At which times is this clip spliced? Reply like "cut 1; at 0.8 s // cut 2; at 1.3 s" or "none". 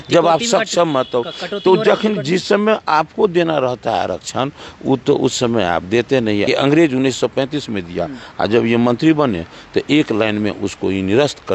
cut 1; at 6.5 s